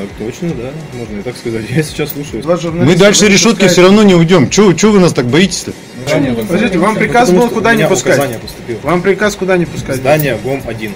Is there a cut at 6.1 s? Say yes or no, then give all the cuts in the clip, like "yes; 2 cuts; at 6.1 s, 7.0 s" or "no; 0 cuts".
yes; 2 cuts; at 2.4 s, 6.1 s